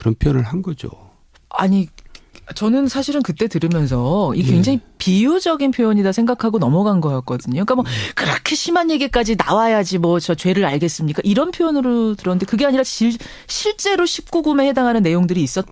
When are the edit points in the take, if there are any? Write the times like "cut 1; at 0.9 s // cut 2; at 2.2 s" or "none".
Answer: cut 1; at 10.7 s